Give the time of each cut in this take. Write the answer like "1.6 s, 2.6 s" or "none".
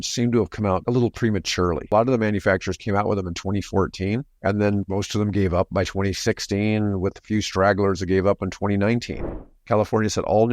0.8 s, 1.9 s, 9.2 s